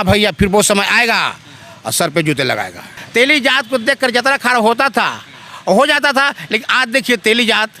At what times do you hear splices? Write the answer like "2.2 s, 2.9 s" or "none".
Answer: 2.9 s